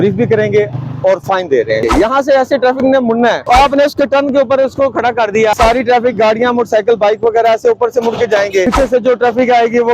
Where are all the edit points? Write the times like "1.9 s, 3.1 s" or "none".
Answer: 1.8 s, 3.4 s, 5.5 s, 8.6 s